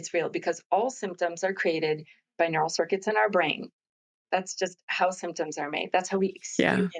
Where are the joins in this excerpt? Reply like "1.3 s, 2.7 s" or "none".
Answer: none